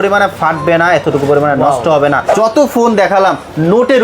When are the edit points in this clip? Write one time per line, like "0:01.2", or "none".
0:02.3